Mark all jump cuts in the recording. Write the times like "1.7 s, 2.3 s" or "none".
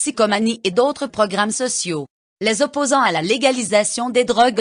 2.2 s